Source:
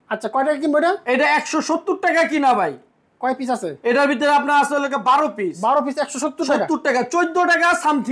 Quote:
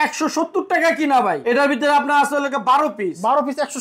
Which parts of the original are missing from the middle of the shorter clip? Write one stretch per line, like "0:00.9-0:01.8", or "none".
0:02.7-0:03.8